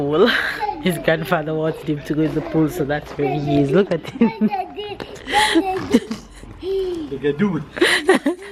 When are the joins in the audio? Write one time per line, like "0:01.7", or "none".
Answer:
none